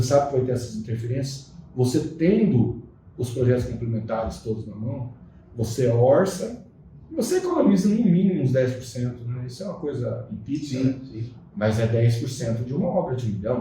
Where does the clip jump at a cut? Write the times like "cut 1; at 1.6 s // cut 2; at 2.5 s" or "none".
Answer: none